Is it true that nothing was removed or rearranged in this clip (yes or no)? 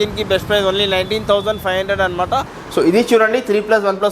no